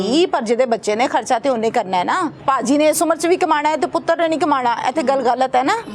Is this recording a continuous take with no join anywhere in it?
no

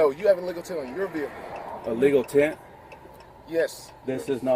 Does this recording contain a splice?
no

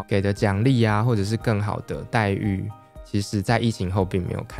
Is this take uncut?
yes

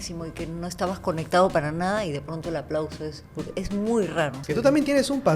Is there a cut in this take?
yes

